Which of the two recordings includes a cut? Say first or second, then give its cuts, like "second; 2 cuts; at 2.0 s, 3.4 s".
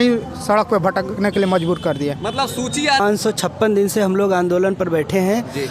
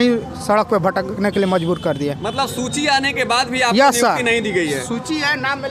first; 1 cut; at 3.0 s